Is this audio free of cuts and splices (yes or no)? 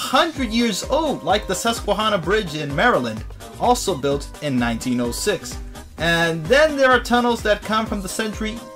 no